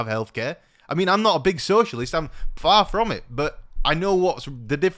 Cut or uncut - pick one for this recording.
uncut